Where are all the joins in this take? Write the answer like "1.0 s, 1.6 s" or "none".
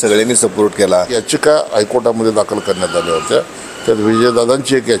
1.2 s